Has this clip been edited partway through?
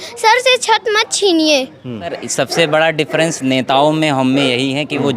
yes; 1 cut; at 2.2 s

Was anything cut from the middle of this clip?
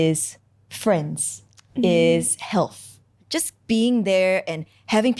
yes; 1 cut; at 3.0 s

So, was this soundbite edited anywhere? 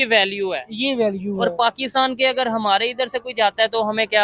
no; 0 cuts

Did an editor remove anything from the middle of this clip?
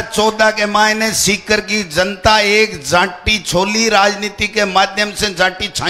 no; 0 cuts

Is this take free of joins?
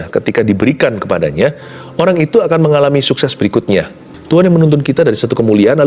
no; 1 cut; at 4.1 s

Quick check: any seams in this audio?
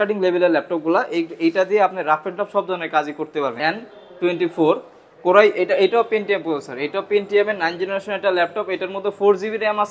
yes; 1 cut; at 3.6 s

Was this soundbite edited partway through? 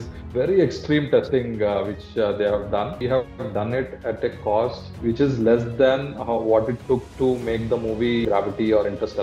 yes; 3 cuts; at 3.0 s, 4.9 s, 8.2 s

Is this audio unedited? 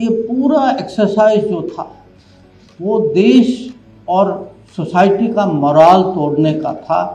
yes; 0 cuts

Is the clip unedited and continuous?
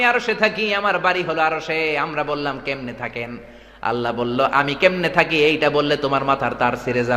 yes; 0 cuts

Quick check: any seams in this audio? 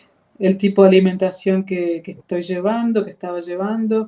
no; 0 cuts

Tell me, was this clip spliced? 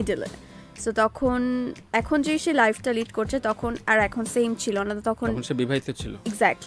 no; 0 cuts

